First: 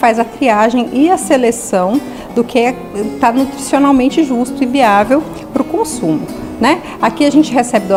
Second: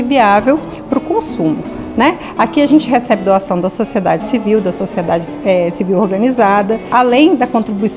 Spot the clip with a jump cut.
second; 1 cut; at 6.8 s

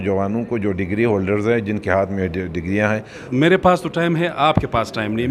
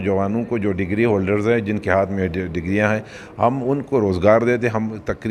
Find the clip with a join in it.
first; 1 cut; at 3.3 s

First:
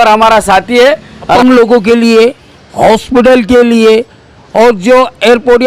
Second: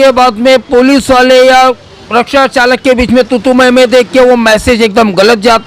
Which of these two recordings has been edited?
first; 1 cut; at 1.3 s

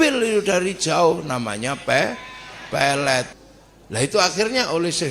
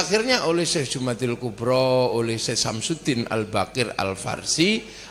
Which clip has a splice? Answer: first; 1 cut; at 3.3 s

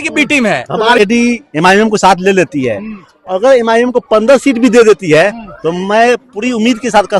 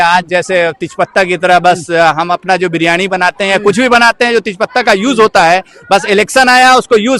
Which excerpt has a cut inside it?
first; 1 cut; at 1.0 s

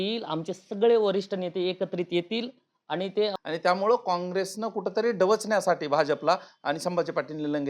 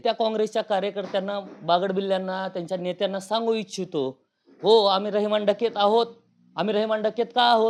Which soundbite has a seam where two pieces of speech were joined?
first; 1 cut; at 3.3 s

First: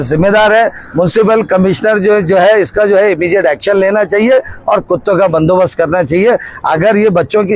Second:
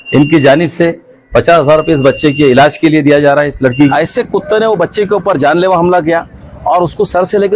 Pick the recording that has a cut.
second; 1 cut; at 3.9 s

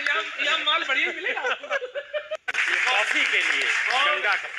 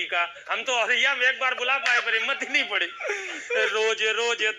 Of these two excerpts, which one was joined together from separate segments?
first; 1 cut; at 2.5 s

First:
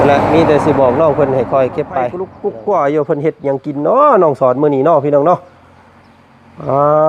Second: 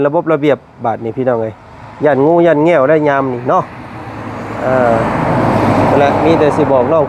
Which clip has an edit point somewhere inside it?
first; 1 cut; at 2.3 s

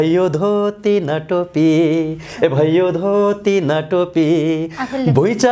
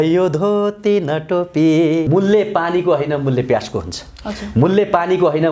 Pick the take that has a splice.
second; 1 cut; at 2.1 s

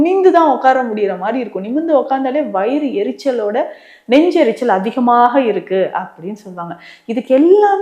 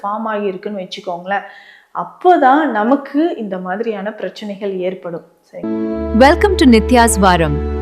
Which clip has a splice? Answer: second; 1 cut; at 5.5 s

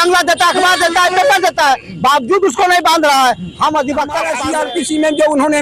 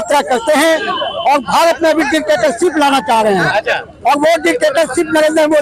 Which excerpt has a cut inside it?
first; 1 cut; at 4.3 s

